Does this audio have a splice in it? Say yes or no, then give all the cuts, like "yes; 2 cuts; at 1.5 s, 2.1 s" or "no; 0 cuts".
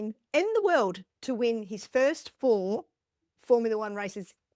no; 0 cuts